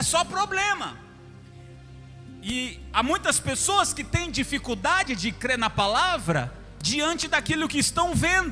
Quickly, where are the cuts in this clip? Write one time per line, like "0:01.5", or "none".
none